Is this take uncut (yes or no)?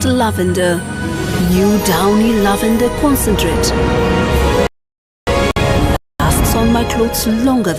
yes